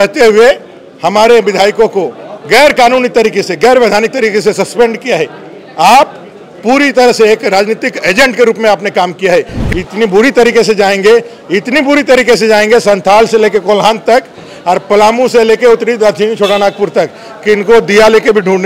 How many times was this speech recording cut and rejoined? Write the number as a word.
one